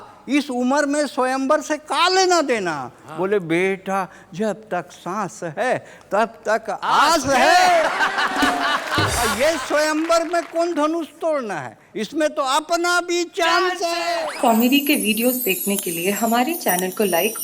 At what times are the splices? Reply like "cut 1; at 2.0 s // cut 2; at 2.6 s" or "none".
cut 1; at 9.2 s // cut 2; at 14.0 s